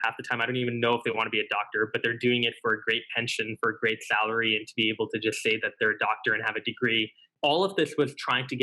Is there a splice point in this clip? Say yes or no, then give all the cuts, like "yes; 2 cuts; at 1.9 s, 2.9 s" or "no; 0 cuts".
yes; 1 cut; at 7.3 s